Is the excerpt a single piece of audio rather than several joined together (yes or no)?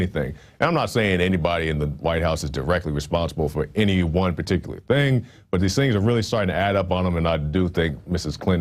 no